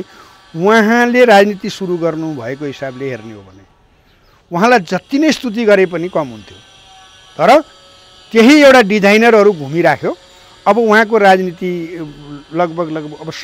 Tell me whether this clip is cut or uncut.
uncut